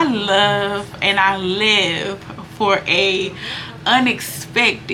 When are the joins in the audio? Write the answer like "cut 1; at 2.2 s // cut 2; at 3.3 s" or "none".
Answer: none